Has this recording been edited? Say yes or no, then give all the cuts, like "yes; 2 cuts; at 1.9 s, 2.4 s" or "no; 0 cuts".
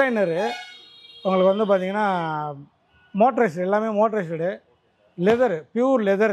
no; 0 cuts